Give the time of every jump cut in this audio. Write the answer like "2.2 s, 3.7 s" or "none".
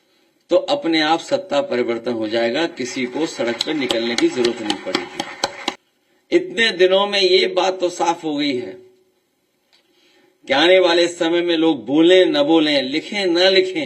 5.8 s